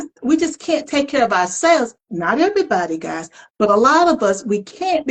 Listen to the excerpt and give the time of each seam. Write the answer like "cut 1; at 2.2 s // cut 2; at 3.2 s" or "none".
none

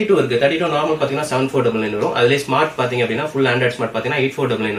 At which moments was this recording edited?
none

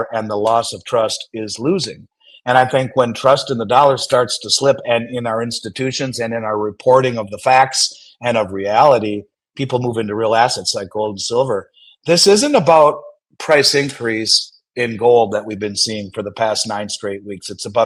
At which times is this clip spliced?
none

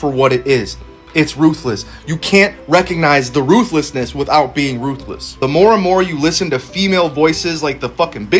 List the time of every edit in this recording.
cut 1; at 2.6 s // cut 2; at 6.4 s

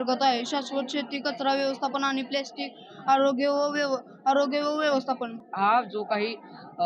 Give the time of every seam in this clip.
cut 1; at 5.3 s

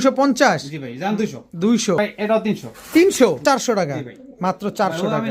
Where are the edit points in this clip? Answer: cut 1; at 2.0 s // cut 2; at 3.4 s

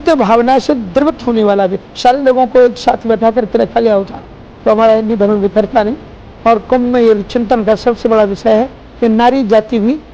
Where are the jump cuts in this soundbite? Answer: cut 1; at 1.9 s // cut 2; at 8.8 s

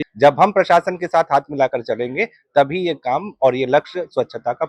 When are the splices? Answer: none

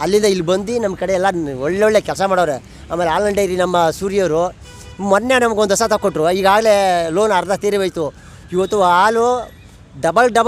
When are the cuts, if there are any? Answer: none

